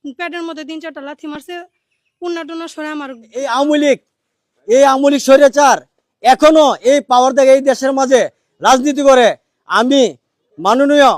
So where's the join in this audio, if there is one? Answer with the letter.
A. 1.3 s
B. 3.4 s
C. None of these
B